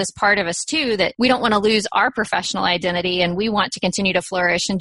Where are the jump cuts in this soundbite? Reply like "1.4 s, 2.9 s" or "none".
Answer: 1.1 s